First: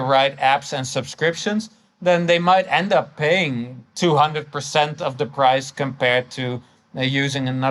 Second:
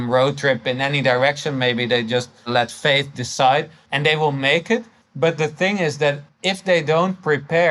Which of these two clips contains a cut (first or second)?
second